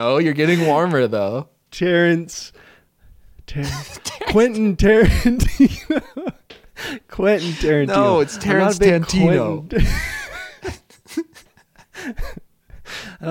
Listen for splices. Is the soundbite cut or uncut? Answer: uncut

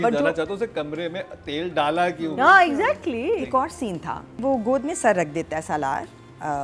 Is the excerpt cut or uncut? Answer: cut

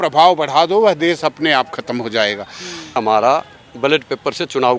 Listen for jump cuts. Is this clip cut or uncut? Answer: cut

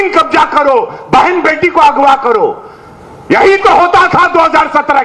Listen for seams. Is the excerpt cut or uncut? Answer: uncut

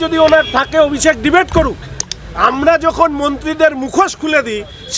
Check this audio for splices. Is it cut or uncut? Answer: cut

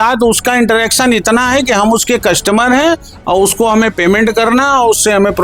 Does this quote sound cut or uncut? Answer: uncut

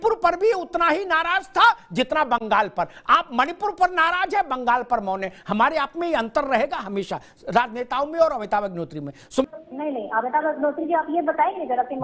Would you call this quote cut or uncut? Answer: cut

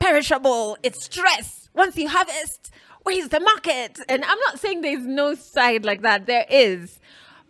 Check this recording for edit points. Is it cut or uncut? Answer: uncut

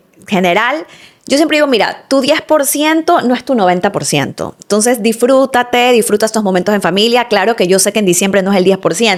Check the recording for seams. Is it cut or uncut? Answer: uncut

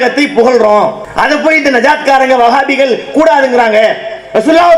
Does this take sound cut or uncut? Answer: cut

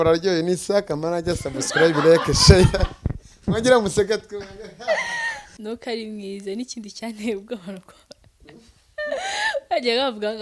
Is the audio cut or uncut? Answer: cut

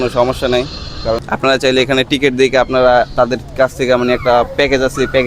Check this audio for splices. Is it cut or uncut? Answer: cut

